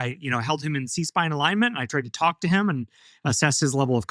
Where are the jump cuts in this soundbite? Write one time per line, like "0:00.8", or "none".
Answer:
none